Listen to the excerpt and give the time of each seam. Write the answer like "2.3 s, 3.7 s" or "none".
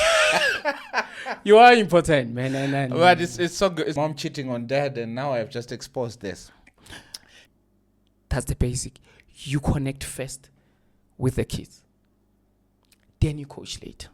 3.9 s, 7.4 s